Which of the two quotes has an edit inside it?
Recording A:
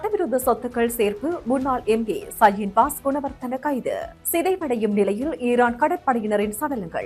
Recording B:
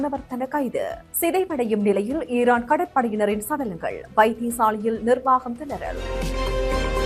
B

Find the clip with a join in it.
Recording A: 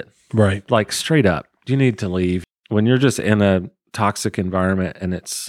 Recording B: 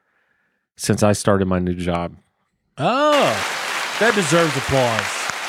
A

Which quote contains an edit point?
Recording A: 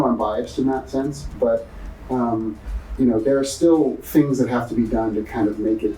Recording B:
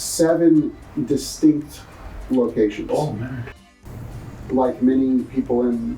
B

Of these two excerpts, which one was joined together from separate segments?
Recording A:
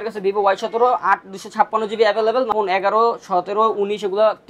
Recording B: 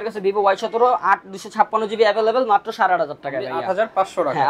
A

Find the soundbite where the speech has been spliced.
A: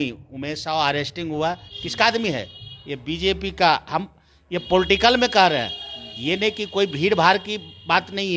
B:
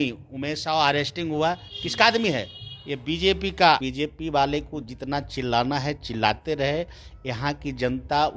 B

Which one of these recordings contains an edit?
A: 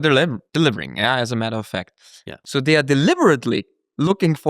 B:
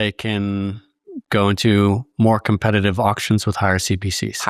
A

